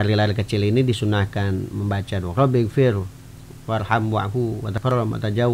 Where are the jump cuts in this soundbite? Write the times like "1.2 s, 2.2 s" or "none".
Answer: none